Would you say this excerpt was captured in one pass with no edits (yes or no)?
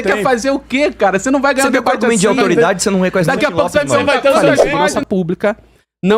no